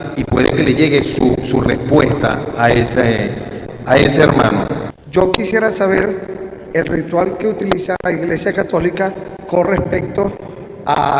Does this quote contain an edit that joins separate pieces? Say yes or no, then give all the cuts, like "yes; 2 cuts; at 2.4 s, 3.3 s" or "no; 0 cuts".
yes; 1 cut; at 4.9 s